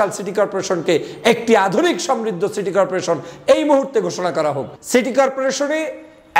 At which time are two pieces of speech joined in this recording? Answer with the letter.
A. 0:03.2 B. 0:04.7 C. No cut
B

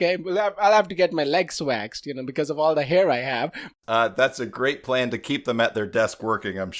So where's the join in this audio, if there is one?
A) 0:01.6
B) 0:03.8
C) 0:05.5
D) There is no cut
B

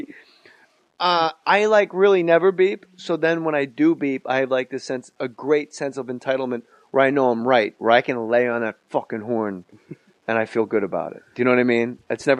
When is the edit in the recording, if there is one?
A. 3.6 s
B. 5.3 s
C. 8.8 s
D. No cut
C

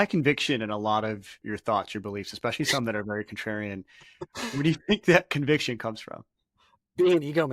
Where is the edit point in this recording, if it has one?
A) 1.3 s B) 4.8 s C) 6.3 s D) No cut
A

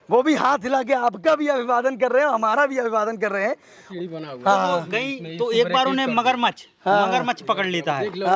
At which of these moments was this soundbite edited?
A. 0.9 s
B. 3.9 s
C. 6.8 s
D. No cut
B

